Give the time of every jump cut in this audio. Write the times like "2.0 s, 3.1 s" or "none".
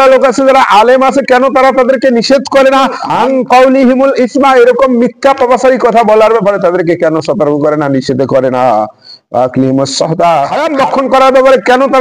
3.0 s, 10.6 s